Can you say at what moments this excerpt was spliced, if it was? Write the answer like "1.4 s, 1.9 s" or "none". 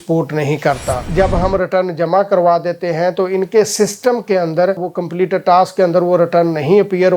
1.1 s